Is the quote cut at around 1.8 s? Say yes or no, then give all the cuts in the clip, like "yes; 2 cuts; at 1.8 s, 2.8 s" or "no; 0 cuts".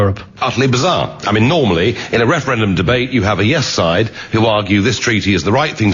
no; 1 cut; at 3.1 s